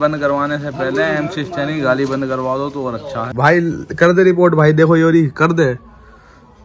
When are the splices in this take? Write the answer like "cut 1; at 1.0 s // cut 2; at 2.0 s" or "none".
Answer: cut 1; at 3.3 s